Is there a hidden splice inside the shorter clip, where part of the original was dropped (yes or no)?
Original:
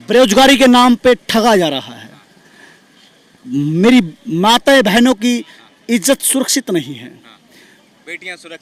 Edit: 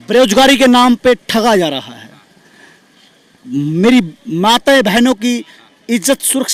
no